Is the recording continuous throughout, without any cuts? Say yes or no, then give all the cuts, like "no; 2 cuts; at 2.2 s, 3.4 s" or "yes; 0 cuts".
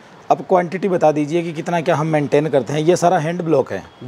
yes; 0 cuts